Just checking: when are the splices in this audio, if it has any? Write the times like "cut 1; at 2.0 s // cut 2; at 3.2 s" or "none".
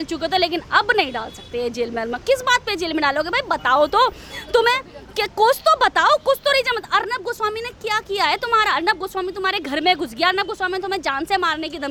none